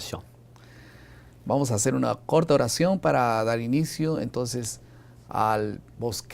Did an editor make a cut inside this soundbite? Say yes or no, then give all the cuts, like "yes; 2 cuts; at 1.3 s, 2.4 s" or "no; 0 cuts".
yes; 1 cut; at 1.1 s